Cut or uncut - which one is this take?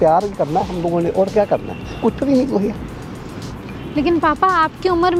uncut